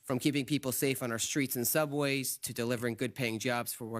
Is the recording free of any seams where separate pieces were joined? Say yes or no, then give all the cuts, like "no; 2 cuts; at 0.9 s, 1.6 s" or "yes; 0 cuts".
no; 1 cut; at 2.2 s